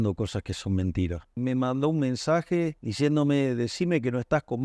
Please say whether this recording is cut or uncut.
cut